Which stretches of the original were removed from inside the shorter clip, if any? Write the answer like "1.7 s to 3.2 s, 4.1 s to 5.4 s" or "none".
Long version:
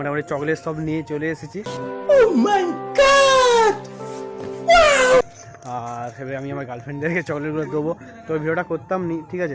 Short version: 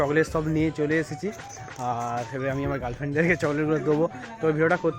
1.9 s to 5.4 s